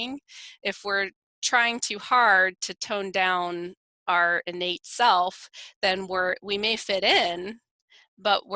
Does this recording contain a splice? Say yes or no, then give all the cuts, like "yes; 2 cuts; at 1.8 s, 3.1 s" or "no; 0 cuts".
no; 0 cuts